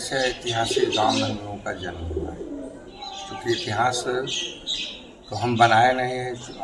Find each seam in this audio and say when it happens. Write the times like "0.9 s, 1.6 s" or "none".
none

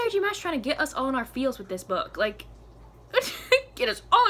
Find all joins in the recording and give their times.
none

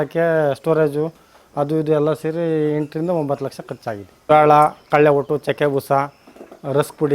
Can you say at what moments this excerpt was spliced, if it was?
4.1 s

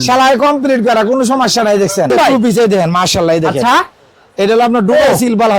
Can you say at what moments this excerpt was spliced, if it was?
2.1 s

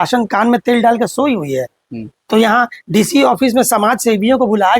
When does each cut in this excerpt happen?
none

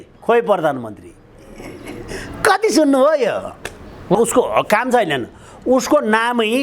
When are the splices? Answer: 4.1 s

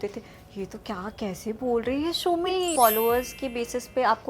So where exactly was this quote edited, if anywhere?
2.7 s

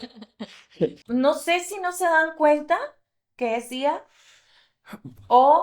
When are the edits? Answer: 1.0 s

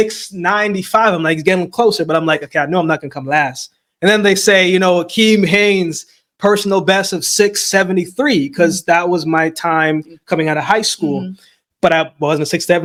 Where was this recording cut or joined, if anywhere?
none

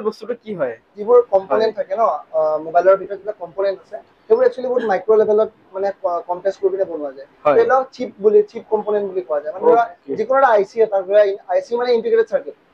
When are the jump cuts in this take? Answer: 1.0 s

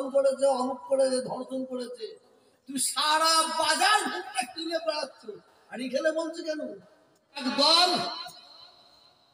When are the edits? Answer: 7.4 s

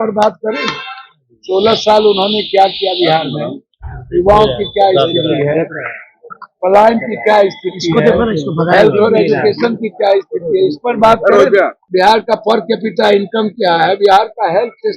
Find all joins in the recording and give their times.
11.8 s

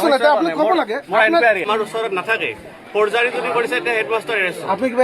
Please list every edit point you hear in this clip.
1.7 s

